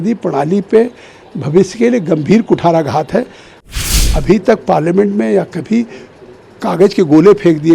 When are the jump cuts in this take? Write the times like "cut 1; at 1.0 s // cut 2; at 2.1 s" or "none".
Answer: cut 1; at 3.7 s